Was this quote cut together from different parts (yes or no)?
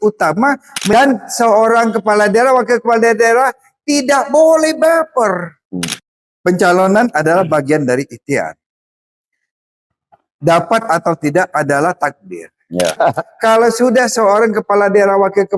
yes